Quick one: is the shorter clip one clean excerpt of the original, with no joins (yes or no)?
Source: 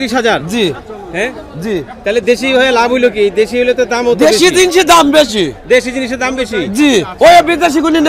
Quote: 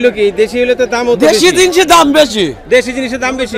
yes